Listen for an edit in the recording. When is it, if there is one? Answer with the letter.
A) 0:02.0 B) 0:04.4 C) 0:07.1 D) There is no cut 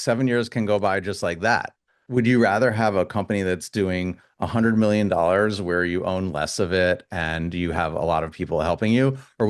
A